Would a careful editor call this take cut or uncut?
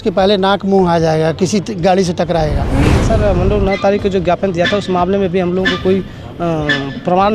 cut